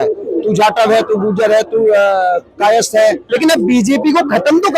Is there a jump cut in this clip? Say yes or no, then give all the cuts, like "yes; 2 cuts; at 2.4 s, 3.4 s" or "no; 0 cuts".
yes; 1 cut; at 3.2 s